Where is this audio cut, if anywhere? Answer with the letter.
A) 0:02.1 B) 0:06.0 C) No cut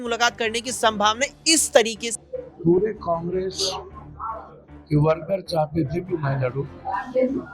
A